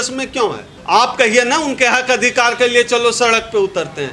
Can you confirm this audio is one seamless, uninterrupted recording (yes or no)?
yes